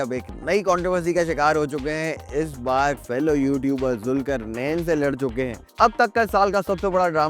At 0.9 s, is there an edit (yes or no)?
no